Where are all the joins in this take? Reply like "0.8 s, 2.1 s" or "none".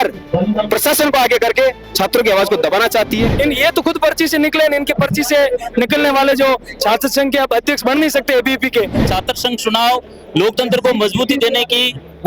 3.3 s, 9.0 s